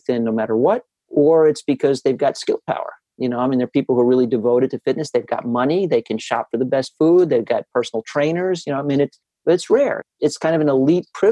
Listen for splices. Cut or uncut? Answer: uncut